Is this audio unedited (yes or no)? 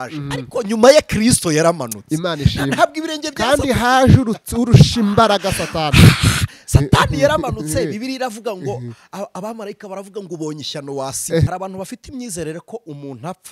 no